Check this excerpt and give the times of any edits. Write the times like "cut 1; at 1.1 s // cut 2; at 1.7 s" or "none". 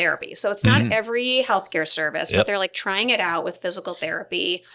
none